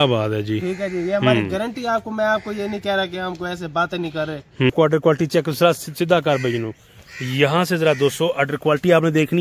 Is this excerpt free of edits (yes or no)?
no